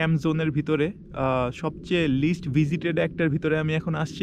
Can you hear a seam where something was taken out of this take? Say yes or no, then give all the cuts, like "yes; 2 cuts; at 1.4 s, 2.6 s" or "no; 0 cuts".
no; 0 cuts